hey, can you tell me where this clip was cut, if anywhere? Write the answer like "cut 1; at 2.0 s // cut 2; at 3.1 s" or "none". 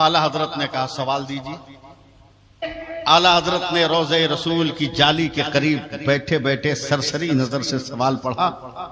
cut 1; at 2.8 s